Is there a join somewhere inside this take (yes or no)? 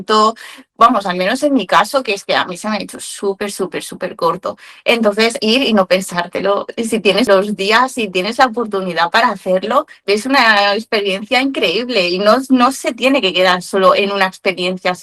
yes